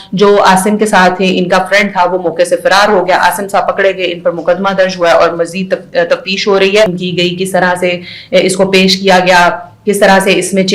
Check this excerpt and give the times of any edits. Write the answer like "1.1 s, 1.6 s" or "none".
7.0 s